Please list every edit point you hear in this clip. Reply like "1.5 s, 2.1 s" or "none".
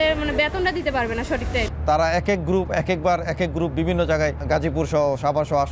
1.7 s, 4.4 s